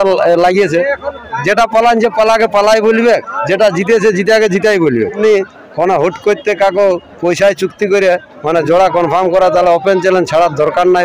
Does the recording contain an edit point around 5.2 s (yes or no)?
yes